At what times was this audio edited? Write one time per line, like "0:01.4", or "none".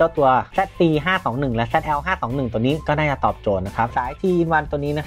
0:03.9